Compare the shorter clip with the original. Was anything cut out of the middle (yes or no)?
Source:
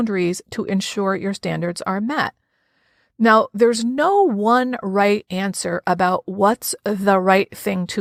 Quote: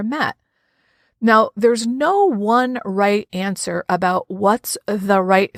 no